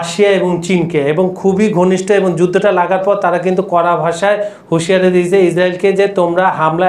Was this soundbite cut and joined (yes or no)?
no